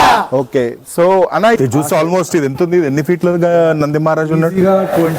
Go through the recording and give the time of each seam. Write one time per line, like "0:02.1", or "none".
0:01.6